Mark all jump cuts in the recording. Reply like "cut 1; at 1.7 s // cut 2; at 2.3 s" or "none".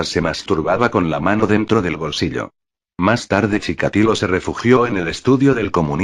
cut 1; at 1.5 s

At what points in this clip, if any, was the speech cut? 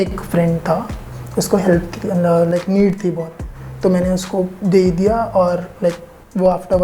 none

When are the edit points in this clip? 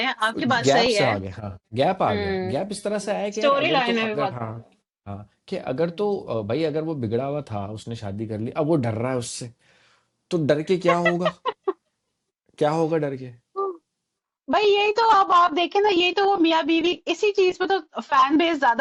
none

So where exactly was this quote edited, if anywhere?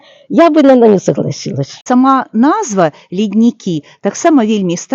cut 1; at 1.8 s

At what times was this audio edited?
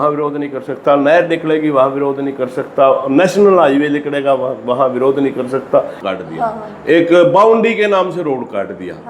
cut 1; at 6.0 s

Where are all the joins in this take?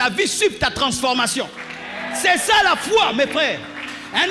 none

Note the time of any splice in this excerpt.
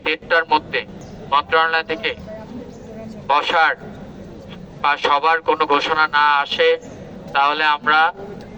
cut 1; at 1.0 s

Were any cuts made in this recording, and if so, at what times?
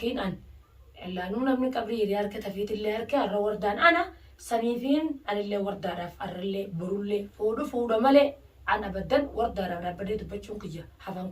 cut 1; at 7.3 s

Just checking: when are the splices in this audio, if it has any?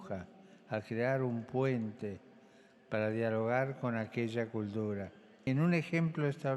cut 1; at 5.5 s

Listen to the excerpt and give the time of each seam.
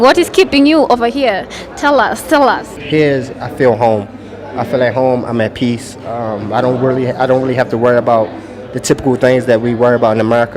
cut 1; at 2.7 s

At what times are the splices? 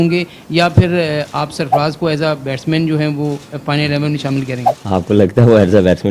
none

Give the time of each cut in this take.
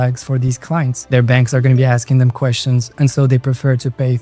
none

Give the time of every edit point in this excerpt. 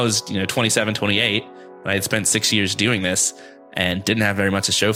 none

